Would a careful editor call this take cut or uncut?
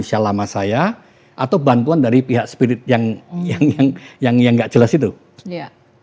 uncut